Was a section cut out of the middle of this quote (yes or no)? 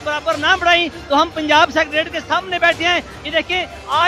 no